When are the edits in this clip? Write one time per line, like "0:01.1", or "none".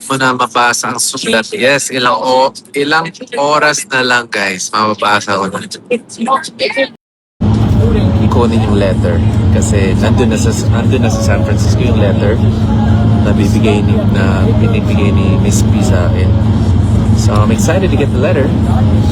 0:07.3